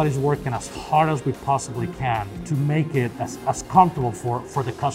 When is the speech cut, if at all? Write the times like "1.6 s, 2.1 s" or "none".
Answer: 2.4 s, 3.1 s

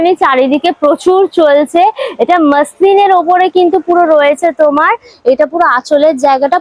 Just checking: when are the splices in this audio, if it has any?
none

